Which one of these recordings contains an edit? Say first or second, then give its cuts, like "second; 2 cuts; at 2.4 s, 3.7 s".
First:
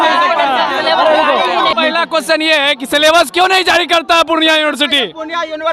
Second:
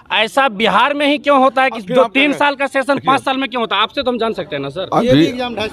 first; 1 cut; at 1.7 s